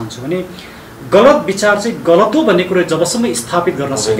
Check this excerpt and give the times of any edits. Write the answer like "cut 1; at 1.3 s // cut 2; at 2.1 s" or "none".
none